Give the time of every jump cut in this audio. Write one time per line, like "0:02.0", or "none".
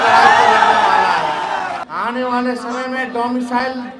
0:01.8